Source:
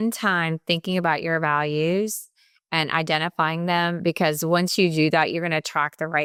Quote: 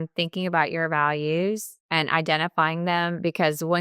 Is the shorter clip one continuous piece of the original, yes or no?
no